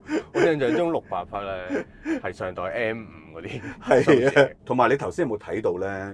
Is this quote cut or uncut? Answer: cut